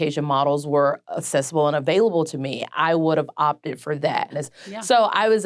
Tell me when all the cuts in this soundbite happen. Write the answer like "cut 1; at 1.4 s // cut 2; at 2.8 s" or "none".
cut 1; at 4.3 s